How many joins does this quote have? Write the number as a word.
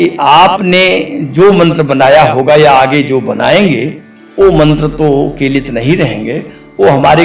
zero